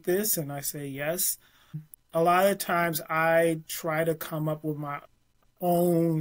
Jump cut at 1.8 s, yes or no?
yes